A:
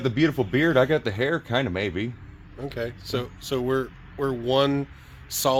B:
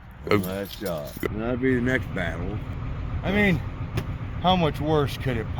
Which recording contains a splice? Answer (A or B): B